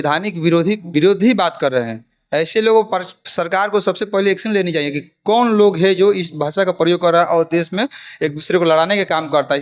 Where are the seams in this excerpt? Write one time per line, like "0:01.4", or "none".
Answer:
none